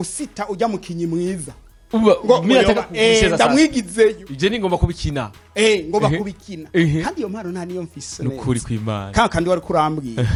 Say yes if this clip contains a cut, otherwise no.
no